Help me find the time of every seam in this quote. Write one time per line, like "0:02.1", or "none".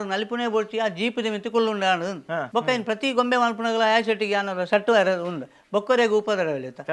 0:02.4